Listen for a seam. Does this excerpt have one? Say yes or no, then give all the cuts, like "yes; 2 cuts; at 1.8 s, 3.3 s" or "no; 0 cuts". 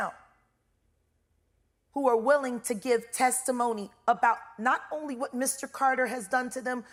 no; 0 cuts